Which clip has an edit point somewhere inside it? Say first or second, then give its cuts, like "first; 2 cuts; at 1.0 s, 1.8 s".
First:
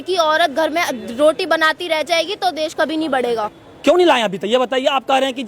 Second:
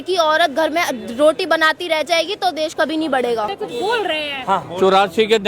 second; 1 cut; at 3.6 s